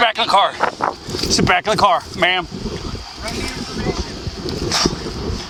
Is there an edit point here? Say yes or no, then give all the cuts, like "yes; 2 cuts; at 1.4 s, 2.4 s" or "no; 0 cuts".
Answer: no; 0 cuts